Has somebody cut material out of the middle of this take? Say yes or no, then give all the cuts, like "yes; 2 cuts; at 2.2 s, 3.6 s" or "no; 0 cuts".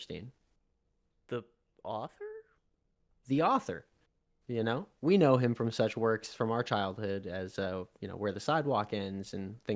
no; 0 cuts